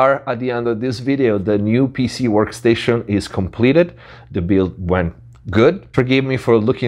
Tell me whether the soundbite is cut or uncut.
uncut